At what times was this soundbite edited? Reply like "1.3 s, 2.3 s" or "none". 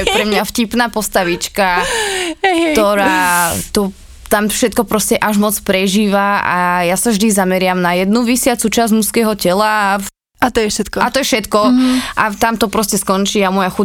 none